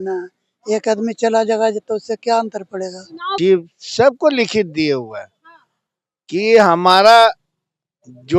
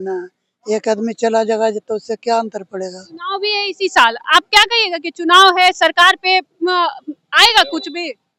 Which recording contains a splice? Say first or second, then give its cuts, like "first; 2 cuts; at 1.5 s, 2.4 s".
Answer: first; 1 cut; at 3.3 s